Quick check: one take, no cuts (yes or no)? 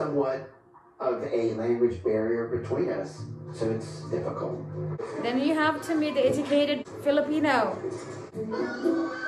no